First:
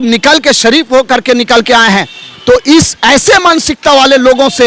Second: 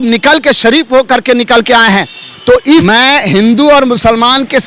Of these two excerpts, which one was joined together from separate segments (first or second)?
second